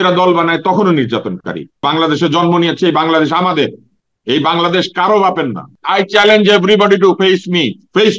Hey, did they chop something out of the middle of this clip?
yes; 2 cuts; at 1.8 s, 5.8 s

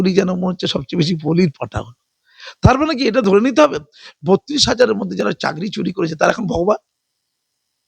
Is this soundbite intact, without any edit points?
yes; 0 cuts

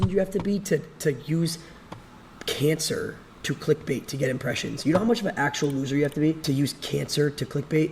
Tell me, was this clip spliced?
yes; 1 cut; at 6.4 s

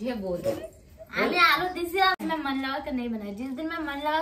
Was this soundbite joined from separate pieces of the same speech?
yes; 1 cut; at 2.2 s

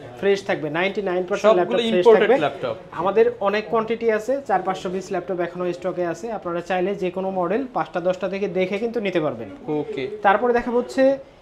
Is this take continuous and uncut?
yes; 0 cuts

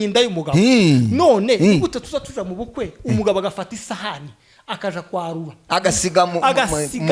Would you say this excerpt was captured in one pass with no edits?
yes; 0 cuts

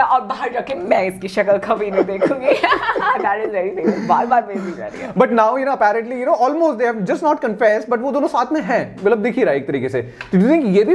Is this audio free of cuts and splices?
yes; 0 cuts

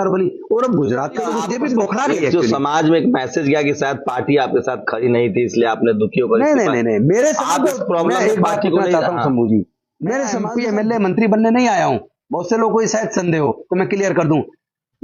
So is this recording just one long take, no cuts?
no; 2 cuts; at 1.4 s, 10.4 s

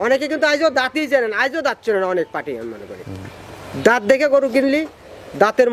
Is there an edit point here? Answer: no; 0 cuts

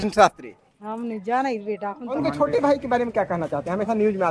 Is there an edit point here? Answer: yes; 1 cut; at 2.2 s

